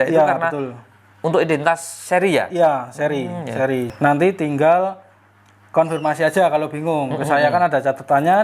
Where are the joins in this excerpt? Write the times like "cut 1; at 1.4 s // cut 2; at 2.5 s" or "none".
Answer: cut 1; at 3.9 s